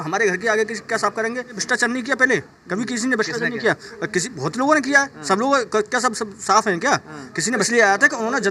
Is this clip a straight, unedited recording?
no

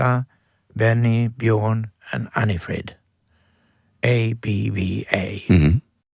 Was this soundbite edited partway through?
no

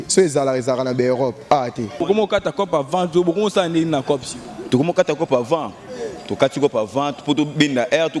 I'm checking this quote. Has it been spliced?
yes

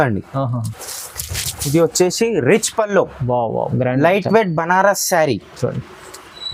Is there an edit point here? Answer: no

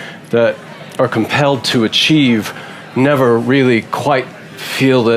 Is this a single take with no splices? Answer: yes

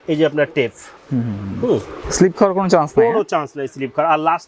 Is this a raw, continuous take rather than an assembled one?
no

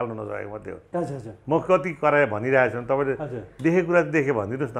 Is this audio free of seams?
yes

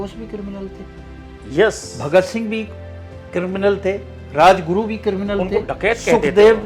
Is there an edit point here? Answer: no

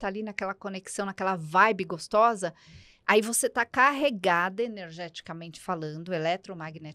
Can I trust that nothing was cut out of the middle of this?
yes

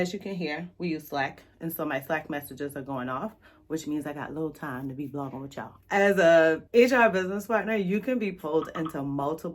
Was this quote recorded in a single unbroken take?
no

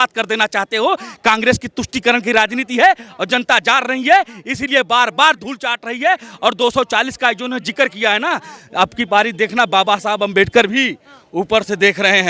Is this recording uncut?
yes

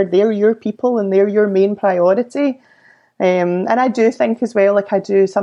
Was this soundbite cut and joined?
no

